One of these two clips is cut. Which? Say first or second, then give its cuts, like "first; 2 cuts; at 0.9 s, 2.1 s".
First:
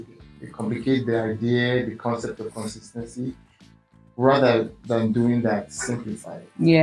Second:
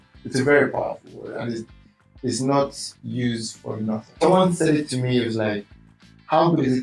second; 1 cut; at 4.2 s